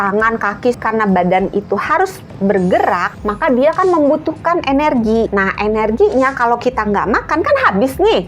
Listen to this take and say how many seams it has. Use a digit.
3